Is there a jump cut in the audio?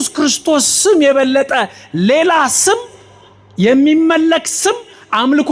no; 0 cuts

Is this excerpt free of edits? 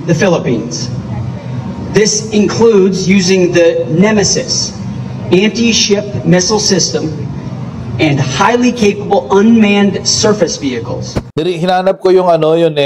no; 1 cut; at 11.2 s

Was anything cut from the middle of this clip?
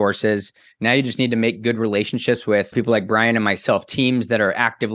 no; 0 cuts

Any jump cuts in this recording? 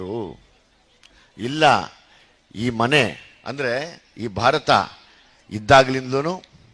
no; 0 cuts

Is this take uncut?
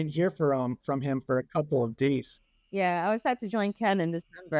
no; 1 cut; at 2.4 s

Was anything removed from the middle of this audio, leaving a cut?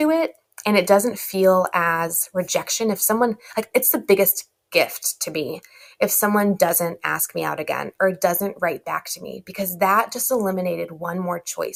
no; 0 cuts

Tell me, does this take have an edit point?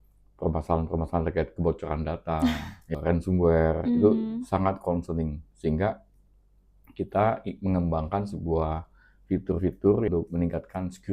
yes; 2 cuts; at 2.9 s, 10.1 s

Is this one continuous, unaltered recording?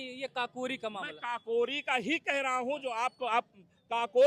yes; 0 cuts

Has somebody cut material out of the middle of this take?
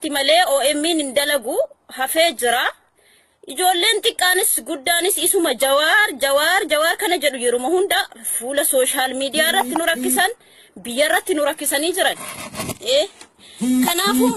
yes; 1 cut; at 6.3 s

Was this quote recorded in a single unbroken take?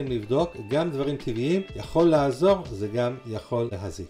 no; 1 cut; at 1.8 s

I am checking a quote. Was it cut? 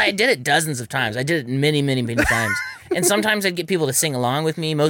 no; 0 cuts

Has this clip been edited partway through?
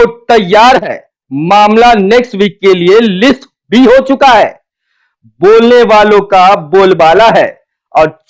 no; 0 cuts

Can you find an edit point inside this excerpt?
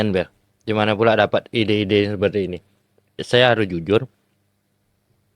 yes; 1 cut; at 3.2 s

